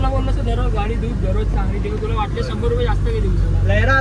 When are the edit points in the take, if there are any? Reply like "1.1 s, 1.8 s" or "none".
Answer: none